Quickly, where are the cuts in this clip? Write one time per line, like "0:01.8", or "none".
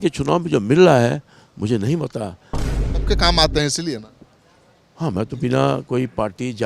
0:02.9

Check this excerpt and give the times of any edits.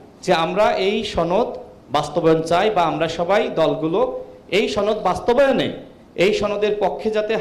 none

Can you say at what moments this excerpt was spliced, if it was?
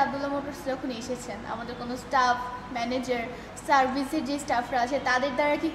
none

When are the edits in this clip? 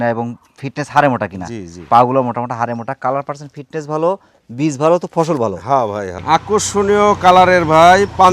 0:06.2

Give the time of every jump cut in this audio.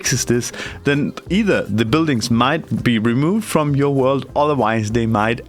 none

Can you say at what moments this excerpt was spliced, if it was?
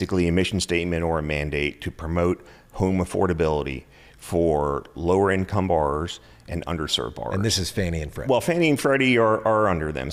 none

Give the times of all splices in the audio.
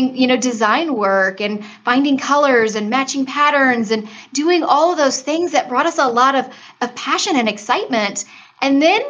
none

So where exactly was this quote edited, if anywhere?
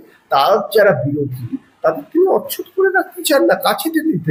none

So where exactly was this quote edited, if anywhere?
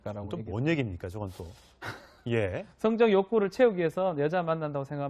0:03.3

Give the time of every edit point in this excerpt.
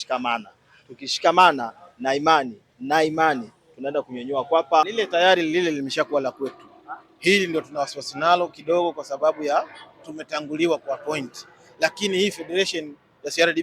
0:04.9

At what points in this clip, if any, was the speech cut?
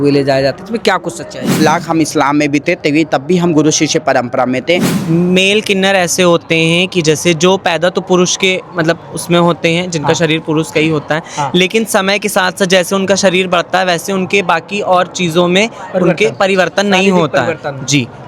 0:01.6
0:04.9

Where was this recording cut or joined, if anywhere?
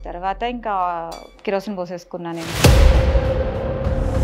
0:01.3

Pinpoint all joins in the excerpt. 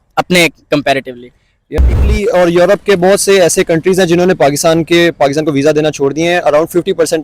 0:01.9

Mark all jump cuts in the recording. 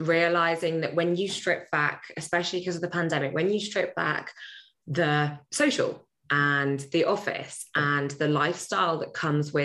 0:05.4

